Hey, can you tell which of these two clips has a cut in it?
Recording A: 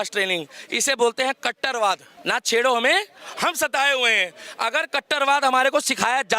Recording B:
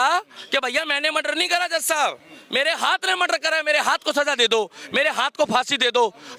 A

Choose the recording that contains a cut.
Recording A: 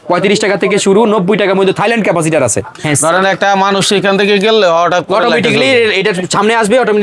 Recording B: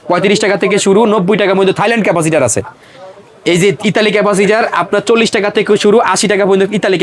A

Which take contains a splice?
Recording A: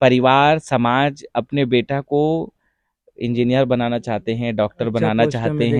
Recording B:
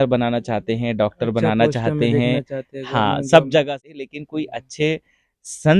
B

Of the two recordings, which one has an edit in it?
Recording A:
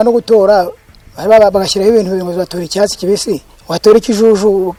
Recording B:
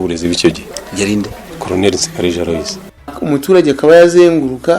B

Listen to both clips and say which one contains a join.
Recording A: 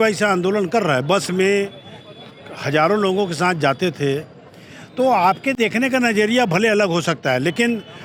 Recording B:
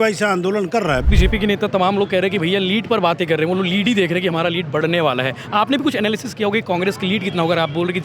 B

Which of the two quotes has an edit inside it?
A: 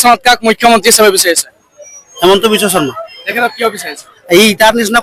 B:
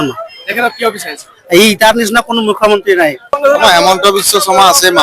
B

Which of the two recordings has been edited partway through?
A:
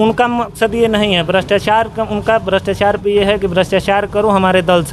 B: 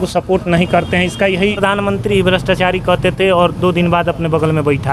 B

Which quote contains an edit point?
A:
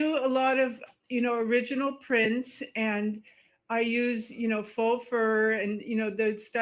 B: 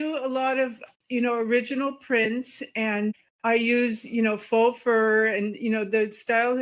B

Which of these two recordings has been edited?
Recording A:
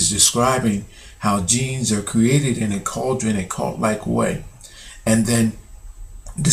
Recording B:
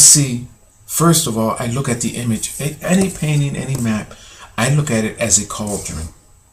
A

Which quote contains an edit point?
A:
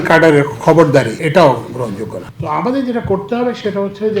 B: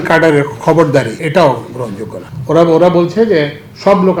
A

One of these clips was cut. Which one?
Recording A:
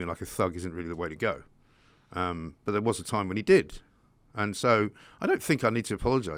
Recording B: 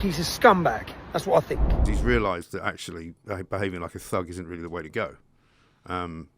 B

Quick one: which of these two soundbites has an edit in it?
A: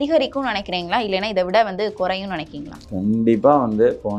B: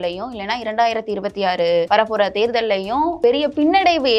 B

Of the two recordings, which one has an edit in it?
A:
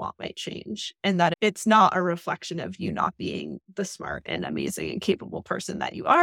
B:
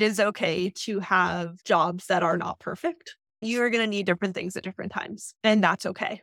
B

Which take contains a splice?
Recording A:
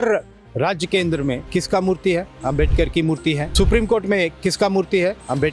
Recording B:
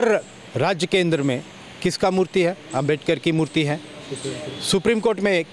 A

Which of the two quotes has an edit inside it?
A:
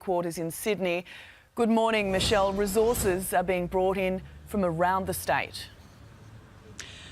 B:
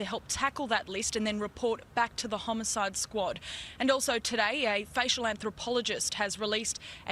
A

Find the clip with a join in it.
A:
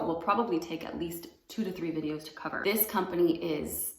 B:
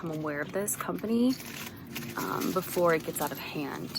A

